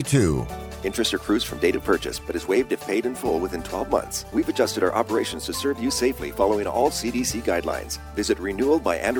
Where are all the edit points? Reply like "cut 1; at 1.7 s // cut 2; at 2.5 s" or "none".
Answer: cut 1; at 4.2 s